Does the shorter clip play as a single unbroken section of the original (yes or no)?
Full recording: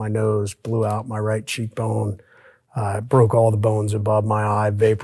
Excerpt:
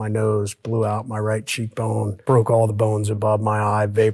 no